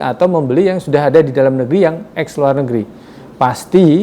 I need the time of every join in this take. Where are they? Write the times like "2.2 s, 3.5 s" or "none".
none

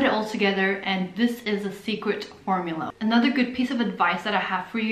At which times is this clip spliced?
2.9 s

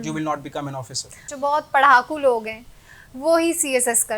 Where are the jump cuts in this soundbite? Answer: 1.2 s

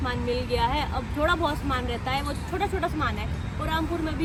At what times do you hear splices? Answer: none

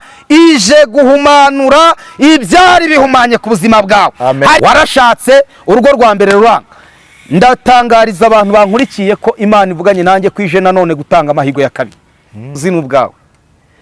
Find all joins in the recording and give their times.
4.6 s, 12.6 s

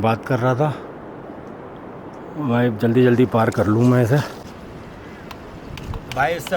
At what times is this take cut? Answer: 4.4 s

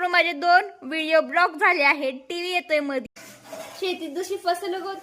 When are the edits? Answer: 3.1 s

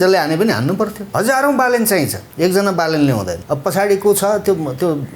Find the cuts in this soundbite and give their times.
1.0 s, 2.2 s, 3.3 s

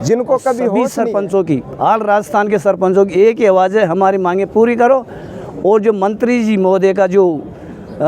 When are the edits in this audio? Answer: 1.0 s

